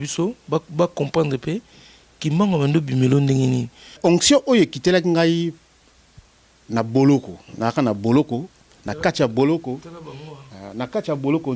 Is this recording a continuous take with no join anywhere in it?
no; 1 cut; at 4.0 s

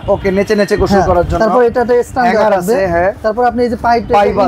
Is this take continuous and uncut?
yes; 0 cuts

